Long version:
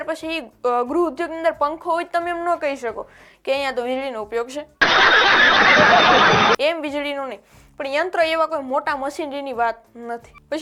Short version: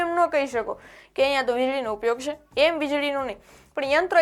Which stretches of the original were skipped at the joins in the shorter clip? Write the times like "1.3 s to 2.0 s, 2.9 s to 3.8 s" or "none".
4.8 s to 6.6 s